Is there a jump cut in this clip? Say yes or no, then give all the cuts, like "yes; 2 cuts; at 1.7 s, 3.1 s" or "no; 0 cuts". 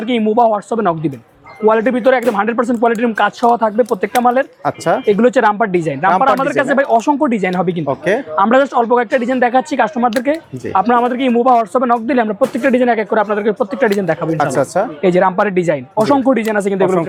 no; 0 cuts